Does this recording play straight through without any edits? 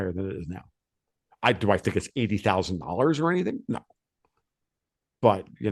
yes; 0 cuts

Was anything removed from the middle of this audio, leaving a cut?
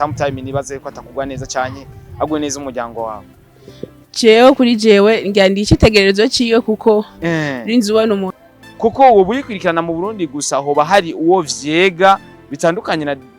yes; 1 cut; at 8.3 s

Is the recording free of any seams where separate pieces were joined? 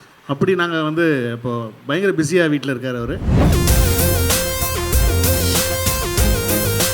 no; 1 cut; at 3.3 s

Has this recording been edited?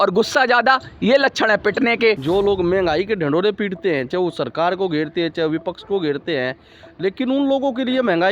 yes; 1 cut; at 2.2 s

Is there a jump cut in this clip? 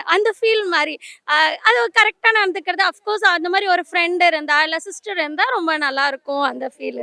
no; 0 cuts

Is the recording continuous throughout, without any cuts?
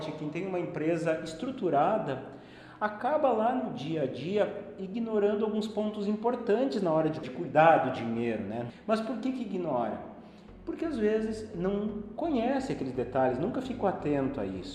no; 2 cuts; at 7.2 s, 8.7 s

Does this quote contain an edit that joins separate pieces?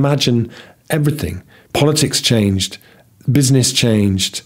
no; 0 cuts

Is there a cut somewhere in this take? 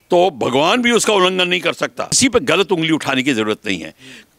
yes; 1 cut; at 2.2 s

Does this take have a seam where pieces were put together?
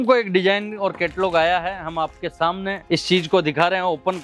yes; 1 cut; at 2.8 s

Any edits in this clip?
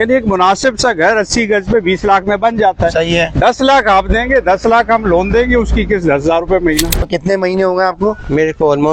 yes; 1 cut; at 7.0 s

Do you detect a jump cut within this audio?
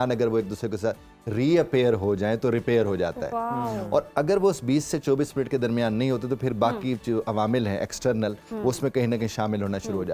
no; 0 cuts

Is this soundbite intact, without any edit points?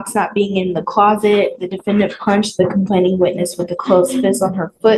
yes; 0 cuts

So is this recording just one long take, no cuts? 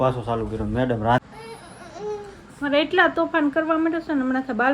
no; 1 cut; at 1.2 s

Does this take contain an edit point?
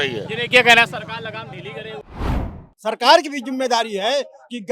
yes; 1 cut; at 2.2 s

